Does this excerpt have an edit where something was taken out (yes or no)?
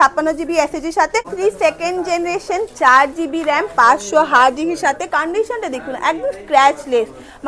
yes